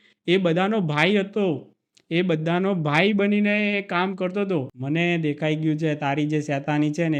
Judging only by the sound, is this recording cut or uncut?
cut